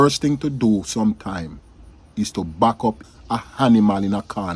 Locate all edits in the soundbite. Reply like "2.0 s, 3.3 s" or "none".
3.0 s